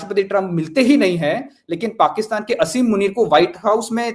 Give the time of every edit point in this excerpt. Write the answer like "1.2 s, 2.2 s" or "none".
none